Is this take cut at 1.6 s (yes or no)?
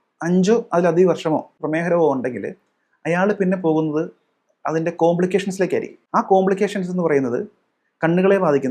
yes